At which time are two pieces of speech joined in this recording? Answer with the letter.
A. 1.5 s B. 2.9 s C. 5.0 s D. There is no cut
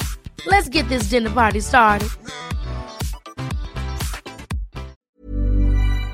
C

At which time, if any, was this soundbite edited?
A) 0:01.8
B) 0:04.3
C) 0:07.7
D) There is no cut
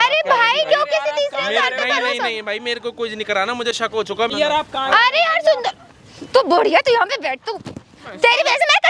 B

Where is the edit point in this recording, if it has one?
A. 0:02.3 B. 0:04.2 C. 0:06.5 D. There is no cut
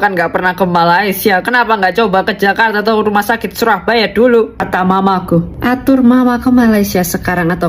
D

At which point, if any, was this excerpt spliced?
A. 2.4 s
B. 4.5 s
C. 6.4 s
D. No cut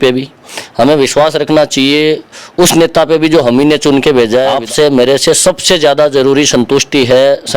B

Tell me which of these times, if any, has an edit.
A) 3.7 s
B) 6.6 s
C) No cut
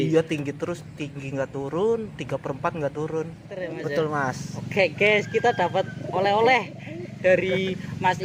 A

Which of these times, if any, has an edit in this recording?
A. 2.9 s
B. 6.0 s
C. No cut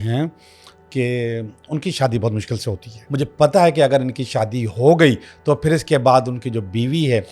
A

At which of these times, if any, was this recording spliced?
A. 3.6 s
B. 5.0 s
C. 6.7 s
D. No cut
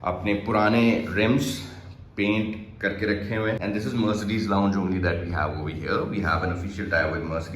A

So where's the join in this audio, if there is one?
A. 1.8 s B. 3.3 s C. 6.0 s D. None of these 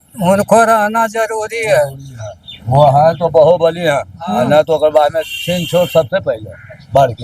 D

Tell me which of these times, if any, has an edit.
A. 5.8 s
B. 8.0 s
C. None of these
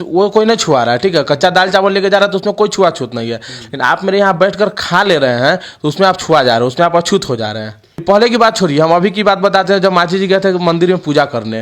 B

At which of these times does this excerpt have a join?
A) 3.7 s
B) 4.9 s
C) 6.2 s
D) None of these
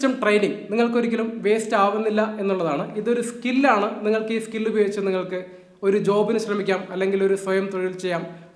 D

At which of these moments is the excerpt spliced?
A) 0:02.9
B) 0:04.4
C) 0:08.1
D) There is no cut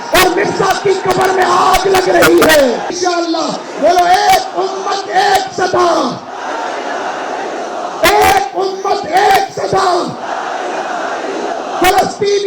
A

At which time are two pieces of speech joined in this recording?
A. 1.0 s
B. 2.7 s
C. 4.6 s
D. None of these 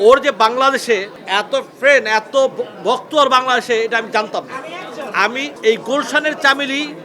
D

